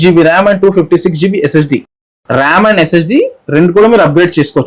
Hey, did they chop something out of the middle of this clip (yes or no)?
no